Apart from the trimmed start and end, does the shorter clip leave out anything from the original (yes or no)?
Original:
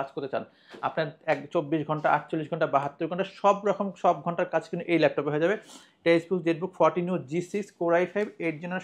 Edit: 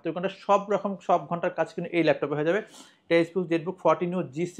no